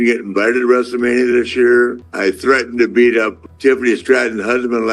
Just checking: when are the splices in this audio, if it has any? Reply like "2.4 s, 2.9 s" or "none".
2.1 s, 3.3 s

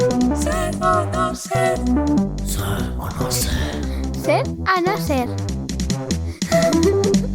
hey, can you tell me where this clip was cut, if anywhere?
none

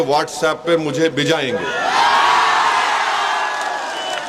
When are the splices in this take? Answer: none

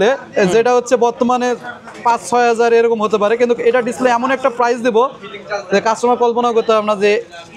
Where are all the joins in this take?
none

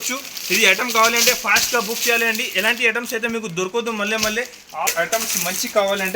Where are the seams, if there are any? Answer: 4.9 s

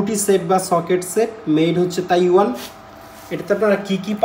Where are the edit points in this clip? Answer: none

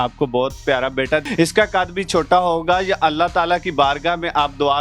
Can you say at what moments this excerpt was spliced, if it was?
1.3 s

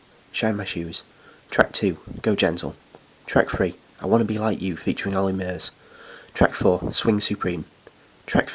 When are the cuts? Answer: none

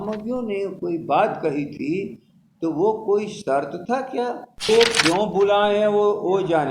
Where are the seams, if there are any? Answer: 4.7 s

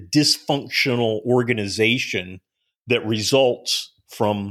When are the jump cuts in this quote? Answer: none

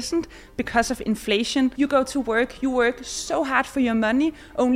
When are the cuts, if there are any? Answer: 1.7 s

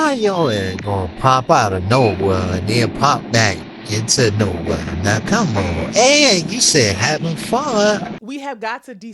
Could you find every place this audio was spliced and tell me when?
8.2 s

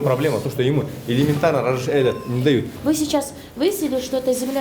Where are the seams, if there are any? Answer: 2.7 s

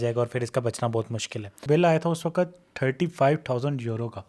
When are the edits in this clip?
1.6 s

